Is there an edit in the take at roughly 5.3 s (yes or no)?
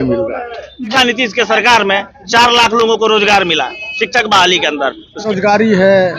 yes